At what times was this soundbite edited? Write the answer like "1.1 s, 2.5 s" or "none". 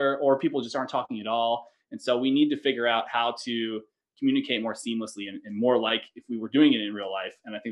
none